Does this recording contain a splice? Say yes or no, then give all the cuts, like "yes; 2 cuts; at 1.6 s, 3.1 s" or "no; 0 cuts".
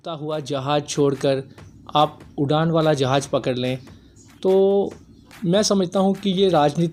no; 0 cuts